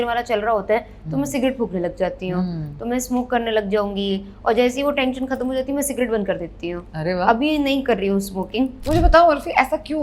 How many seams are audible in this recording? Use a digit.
1